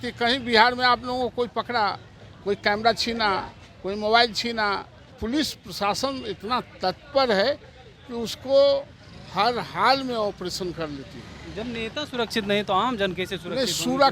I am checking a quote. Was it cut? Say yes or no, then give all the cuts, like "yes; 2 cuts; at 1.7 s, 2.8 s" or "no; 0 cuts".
yes; 1 cut; at 5.1 s